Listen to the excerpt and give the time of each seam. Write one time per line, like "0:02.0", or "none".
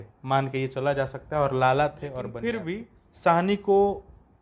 0:02.5